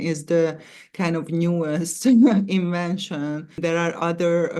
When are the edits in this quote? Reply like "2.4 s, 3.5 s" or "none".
3.5 s